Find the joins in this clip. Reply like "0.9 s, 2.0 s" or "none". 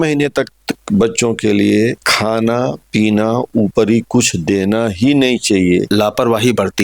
2.1 s, 5.9 s